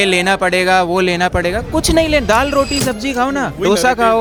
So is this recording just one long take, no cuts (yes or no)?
yes